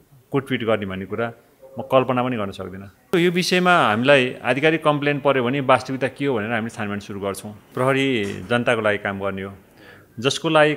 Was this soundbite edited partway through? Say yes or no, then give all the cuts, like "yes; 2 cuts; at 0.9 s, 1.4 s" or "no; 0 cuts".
yes; 2 cuts; at 3.1 s, 7.7 s